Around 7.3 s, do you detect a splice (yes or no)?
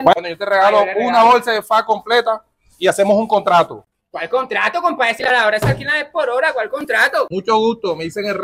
yes